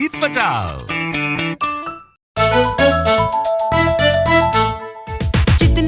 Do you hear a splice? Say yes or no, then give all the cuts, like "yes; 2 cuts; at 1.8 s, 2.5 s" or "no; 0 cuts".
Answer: yes; 1 cut; at 2.2 s